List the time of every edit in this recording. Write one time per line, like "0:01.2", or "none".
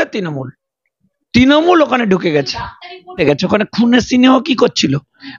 0:03.2